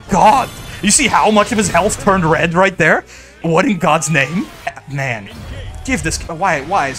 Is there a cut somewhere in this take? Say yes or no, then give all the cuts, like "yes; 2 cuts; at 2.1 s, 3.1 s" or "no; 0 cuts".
yes; 2 cuts; at 3.4 s, 4.8 s